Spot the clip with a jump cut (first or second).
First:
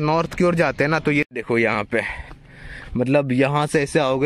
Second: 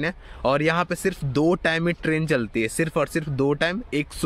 first